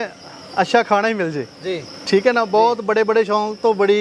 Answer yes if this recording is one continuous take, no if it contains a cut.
yes